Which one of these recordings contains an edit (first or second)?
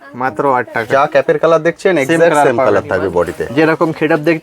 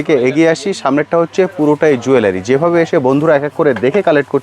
first